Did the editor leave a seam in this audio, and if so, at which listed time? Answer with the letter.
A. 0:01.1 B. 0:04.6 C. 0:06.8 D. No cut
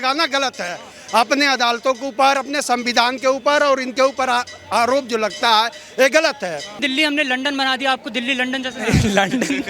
C